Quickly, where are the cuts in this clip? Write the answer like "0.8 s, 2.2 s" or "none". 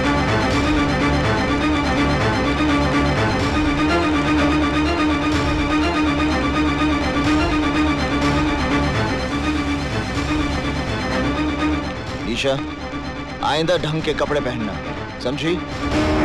none